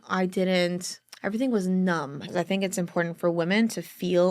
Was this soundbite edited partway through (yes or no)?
yes